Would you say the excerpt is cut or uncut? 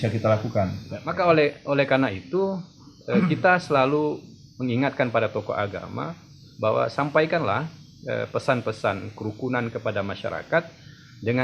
cut